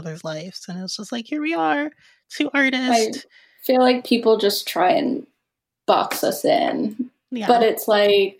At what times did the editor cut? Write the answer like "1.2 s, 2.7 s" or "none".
none